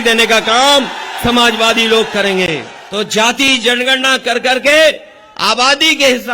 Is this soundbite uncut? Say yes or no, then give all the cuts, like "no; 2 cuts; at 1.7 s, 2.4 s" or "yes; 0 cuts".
no; 1 cut; at 2.8 s